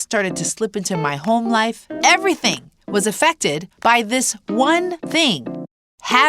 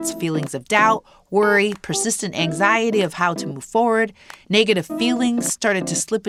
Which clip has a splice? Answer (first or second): first